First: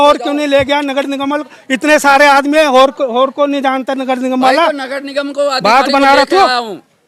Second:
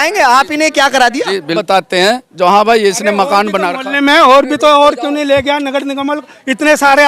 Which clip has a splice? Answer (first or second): second